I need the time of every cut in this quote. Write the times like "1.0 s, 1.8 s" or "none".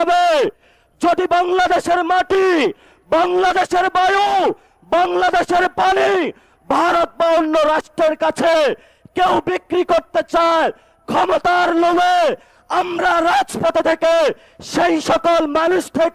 none

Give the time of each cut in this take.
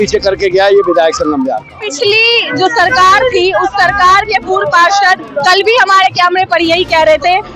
1.8 s

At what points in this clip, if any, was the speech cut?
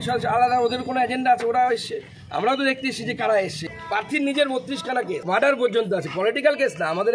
3.8 s, 5.2 s

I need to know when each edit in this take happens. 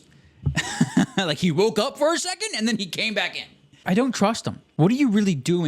3.8 s, 4.6 s

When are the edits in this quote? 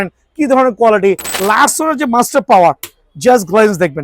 1.3 s

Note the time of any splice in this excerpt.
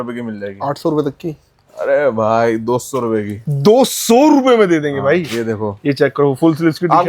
none

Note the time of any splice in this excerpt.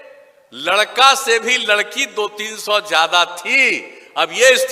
none

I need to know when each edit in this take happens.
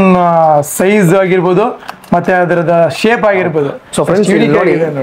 none

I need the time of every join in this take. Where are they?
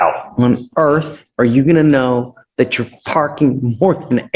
none

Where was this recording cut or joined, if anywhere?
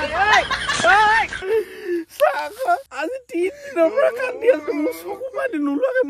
1.4 s, 2.9 s

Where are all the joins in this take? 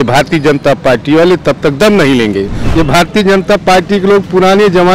2.6 s

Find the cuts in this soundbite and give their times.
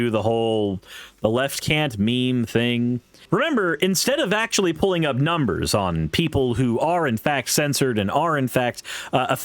3.1 s

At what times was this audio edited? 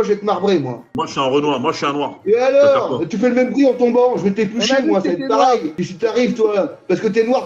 1.0 s

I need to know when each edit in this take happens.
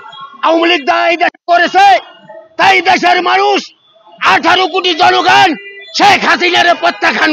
none

